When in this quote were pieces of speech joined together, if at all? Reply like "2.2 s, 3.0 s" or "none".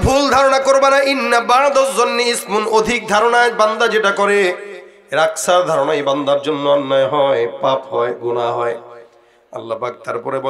none

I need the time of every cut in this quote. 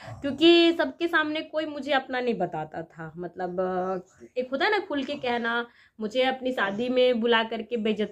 none

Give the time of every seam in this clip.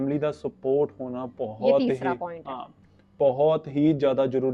none

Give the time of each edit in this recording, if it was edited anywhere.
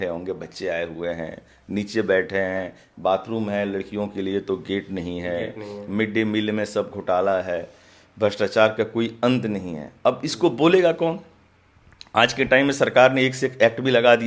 none

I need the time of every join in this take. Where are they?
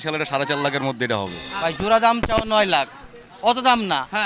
1.4 s

